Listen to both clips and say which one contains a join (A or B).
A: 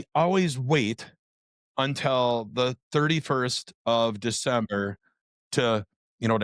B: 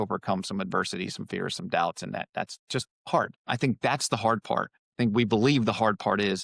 B